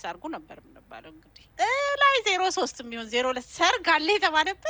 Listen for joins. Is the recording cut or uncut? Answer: cut